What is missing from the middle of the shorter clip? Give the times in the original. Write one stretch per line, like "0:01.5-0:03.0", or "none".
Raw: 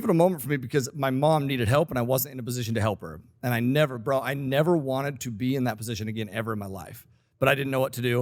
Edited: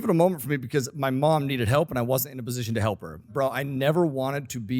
0:03.3-0:04.0